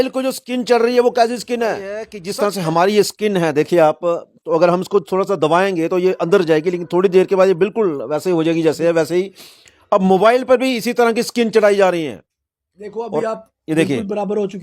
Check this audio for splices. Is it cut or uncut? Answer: cut